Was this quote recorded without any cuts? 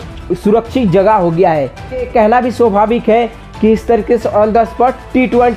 no; 1 cut; at 2.1 s

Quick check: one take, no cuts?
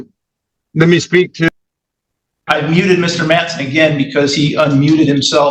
yes; 0 cuts

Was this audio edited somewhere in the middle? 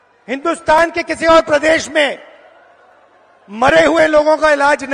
no; 0 cuts

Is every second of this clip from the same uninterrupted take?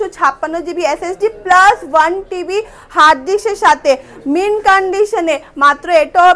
yes; 0 cuts

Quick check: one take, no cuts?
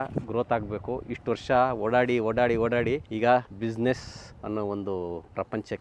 yes; 0 cuts

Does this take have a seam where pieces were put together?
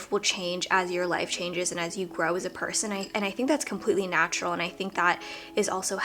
no; 0 cuts

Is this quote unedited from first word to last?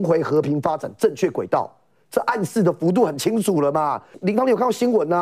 no; 1 cut; at 4.1 s

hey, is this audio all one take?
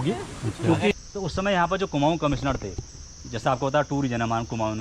no; 1 cut; at 0.9 s

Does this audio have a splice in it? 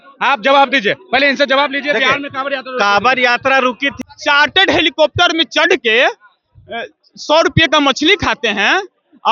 yes; 1 cut; at 3.9 s

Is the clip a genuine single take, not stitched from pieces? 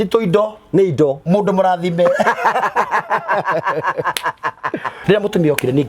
no; 1 cut; at 4.9 s

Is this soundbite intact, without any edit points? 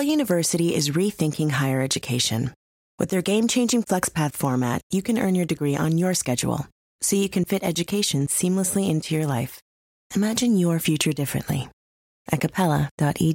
yes; 0 cuts

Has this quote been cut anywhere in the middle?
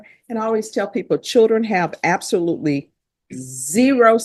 no; 0 cuts

